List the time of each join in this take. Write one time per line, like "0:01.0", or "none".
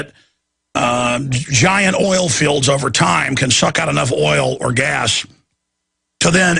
none